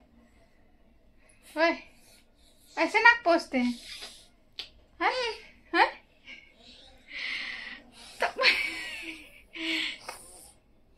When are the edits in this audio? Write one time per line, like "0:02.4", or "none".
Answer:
none